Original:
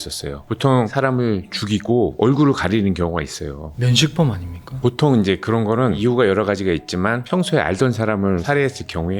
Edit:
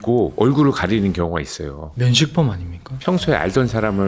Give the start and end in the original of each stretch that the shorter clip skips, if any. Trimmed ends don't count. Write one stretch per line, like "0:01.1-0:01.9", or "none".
0:04.8-0:07.2

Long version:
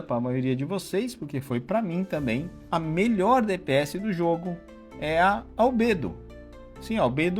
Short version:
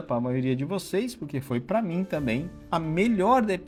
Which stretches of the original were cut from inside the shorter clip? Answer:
none

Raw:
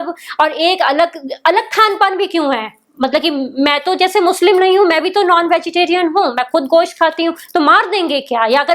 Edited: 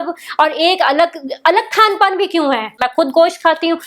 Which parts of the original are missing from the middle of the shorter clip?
0:02.8-0:06.4

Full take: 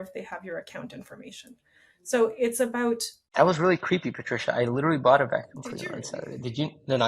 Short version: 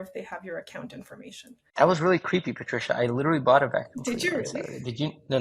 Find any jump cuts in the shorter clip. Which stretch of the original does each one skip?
0:01.6-0:03.2

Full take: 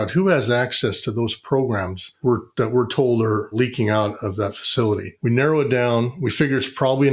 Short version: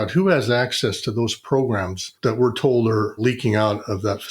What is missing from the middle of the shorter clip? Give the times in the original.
0:02.1-0:02.5

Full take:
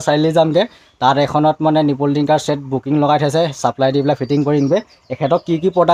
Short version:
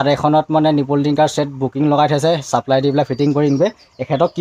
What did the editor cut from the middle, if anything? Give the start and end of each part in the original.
none

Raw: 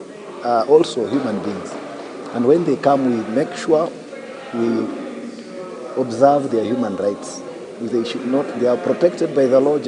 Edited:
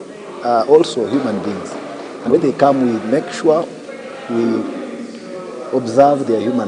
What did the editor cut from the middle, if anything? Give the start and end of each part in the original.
0:02.3-0:02.6

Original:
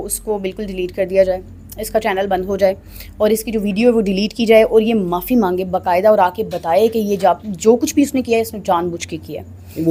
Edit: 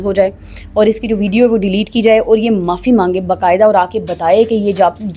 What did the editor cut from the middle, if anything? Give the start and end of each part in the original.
none

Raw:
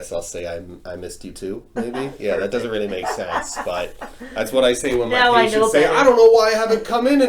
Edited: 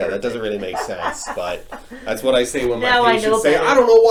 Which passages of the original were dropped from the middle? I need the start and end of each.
none

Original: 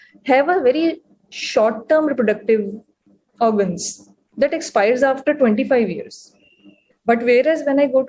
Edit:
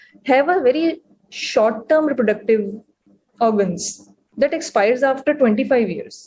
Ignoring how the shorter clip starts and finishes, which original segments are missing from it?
none

